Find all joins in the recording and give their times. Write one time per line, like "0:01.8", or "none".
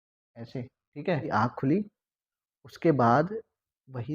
0:01.3